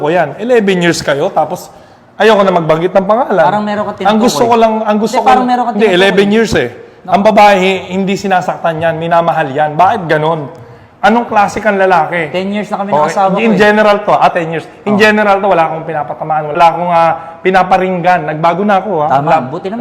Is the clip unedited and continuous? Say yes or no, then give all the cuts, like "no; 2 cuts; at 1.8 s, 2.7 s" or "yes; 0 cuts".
no; 1 cut; at 16.5 s